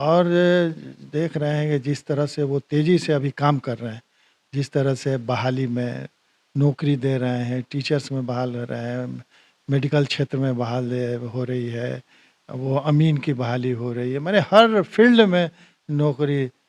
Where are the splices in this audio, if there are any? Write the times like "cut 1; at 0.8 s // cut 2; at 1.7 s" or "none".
none